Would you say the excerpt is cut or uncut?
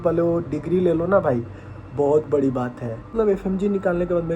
cut